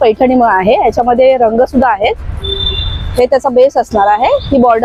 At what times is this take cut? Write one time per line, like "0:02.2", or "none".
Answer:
none